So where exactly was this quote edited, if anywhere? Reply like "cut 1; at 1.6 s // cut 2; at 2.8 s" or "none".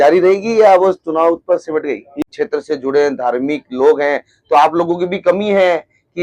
cut 1; at 2.2 s